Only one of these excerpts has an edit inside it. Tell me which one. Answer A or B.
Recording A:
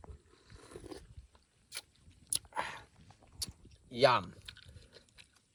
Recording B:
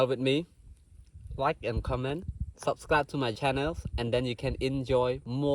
B